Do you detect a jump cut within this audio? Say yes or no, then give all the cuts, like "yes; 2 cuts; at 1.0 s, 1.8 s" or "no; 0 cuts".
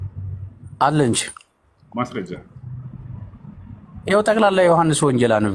no; 0 cuts